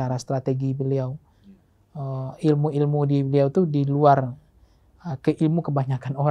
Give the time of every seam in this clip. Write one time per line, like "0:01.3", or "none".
none